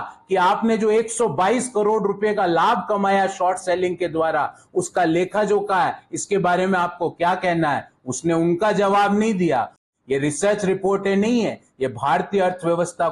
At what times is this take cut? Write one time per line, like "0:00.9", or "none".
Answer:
0:09.8